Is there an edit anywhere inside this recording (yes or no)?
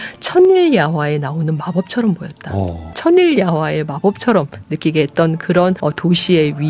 yes